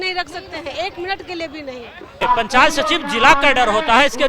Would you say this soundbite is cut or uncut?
cut